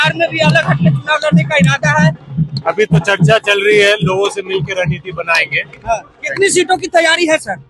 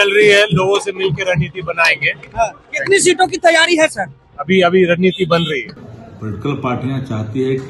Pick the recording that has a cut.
second; 1 cut; at 5.7 s

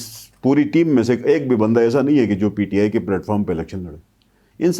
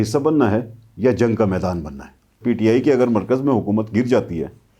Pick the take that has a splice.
second; 1 cut; at 2.4 s

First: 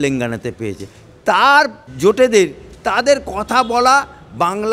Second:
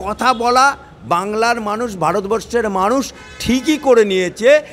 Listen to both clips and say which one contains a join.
first; 1 cut; at 1.8 s

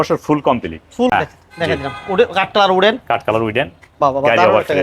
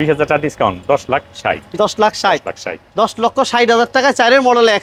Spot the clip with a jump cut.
first; 1 cut; at 1.1 s

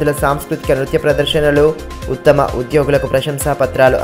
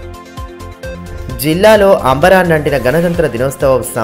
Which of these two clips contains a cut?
second; 1 cut; at 0.9 s

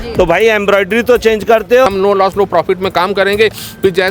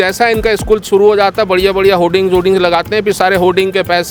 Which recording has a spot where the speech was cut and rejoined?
first; 1 cut; at 1.9 s

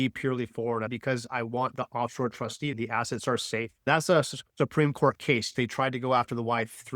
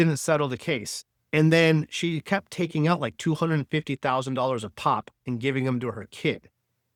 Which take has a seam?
first; 4 cuts; at 0.9 s, 2.7 s, 3.9 s, 5.5 s

